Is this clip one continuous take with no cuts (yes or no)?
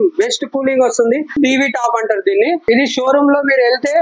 no